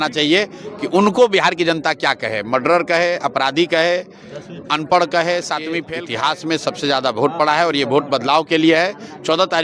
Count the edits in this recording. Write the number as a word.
one